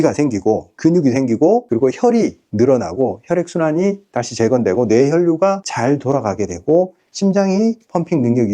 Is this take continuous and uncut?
yes; 0 cuts

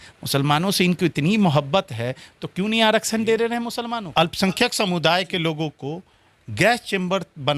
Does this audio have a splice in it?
yes; 1 cut; at 3.8 s

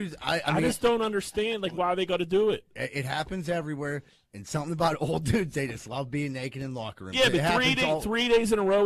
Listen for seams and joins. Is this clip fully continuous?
yes; 0 cuts

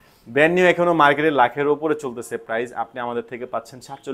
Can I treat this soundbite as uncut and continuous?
yes; 0 cuts

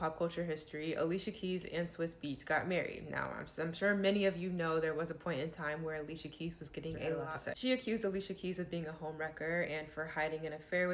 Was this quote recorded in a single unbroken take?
no; 1 cut; at 7.3 s

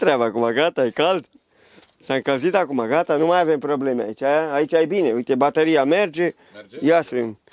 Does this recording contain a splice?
no; 0 cuts

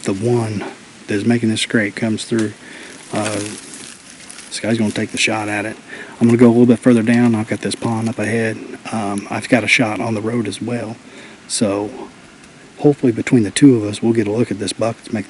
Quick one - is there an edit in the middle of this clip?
no; 0 cuts

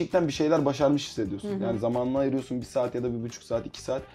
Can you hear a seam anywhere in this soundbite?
no; 0 cuts

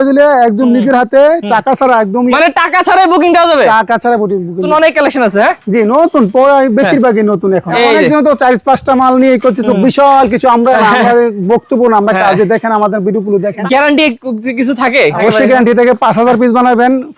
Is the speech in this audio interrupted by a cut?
yes; 5 cuts; at 2.3 s, 4.7 s, 7.7 s, 13.6 s, 15.2 s

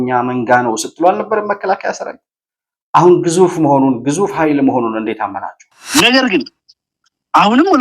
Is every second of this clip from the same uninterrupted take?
no; 1 cut; at 5.8 s

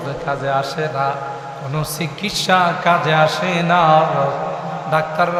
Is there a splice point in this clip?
no; 0 cuts

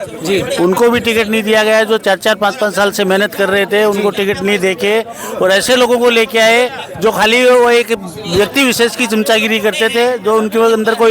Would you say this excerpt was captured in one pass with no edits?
yes; 0 cuts

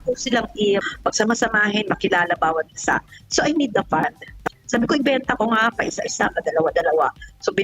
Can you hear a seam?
yes; 2 cuts; at 0.9 s, 4.3 s

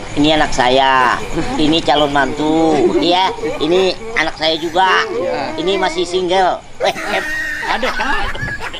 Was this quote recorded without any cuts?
yes; 0 cuts

